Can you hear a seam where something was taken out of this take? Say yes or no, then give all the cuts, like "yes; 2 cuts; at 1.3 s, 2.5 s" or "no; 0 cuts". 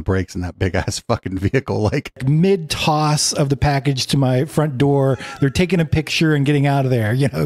yes; 1 cut; at 2.2 s